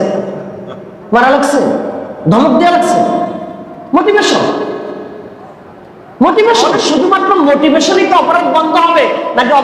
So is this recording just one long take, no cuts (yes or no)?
no